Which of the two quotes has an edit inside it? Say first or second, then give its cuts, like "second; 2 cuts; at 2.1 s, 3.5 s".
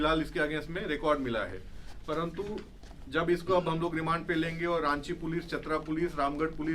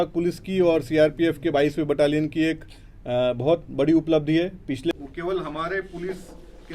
second; 1 cut; at 4.9 s